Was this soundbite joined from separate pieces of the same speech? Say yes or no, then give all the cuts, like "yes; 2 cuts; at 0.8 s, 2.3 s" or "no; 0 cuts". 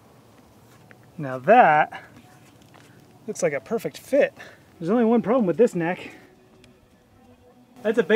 no; 0 cuts